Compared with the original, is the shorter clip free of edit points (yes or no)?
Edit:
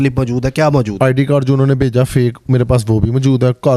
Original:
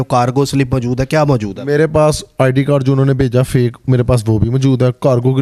no